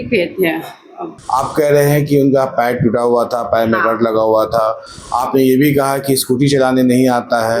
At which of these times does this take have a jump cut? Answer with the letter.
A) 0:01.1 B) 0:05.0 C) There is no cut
A